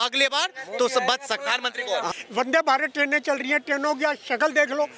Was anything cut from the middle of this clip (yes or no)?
yes